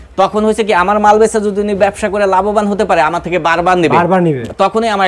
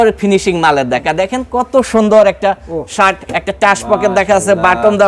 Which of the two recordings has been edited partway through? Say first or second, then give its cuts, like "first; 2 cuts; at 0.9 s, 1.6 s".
second; 1 cut; at 1.0 s